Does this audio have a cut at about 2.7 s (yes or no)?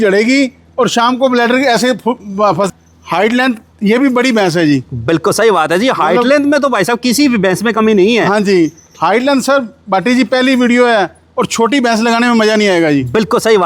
yes